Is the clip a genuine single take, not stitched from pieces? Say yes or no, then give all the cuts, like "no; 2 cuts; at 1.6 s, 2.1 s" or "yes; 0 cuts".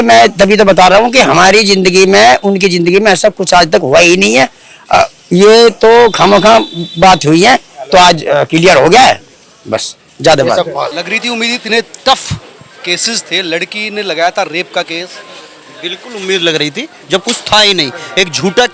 yes; 0 cuts